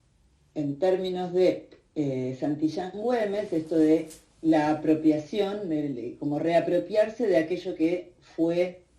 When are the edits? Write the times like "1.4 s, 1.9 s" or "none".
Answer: 5.8 s